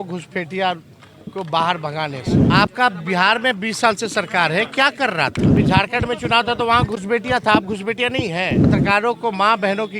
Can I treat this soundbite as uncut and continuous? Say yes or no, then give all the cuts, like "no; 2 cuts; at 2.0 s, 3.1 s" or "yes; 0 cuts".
no; 3 cuts; at 2.3 s, 5.5 s, 8.7 s